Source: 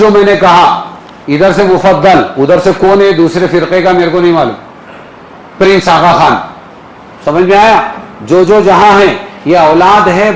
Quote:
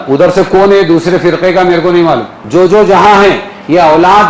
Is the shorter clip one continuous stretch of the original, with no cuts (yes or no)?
no